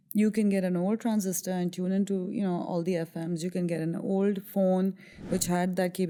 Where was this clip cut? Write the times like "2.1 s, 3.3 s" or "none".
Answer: none